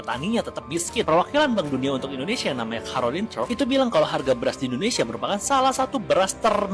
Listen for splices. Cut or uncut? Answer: uncut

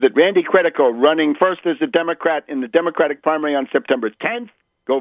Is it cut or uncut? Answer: cut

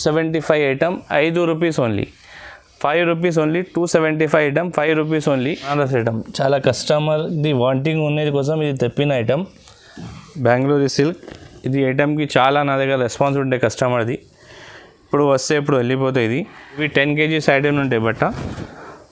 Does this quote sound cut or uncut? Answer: cut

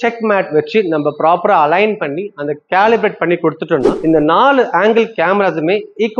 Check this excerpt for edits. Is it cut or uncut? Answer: uncut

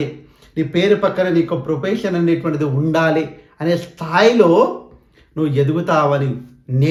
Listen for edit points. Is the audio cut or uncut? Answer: uncut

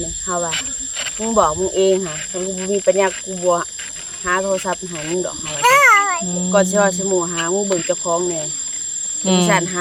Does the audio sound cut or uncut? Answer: uncut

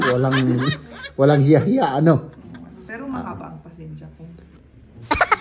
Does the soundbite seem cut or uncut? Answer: cut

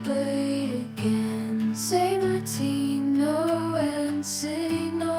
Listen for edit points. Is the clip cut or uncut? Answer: uncut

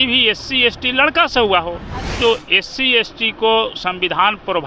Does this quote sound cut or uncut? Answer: cut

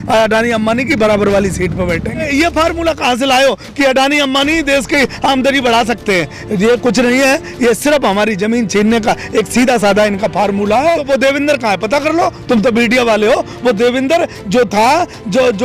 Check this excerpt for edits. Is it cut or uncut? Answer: cut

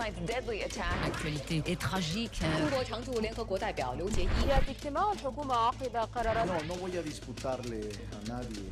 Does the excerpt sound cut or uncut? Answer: uncut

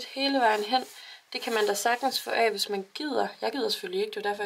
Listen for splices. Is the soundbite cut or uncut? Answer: uncut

